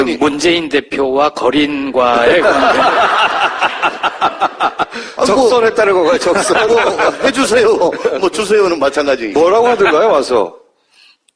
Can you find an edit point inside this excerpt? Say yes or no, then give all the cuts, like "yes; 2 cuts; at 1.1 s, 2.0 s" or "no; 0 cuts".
yes; 1 cut; at 9.9 s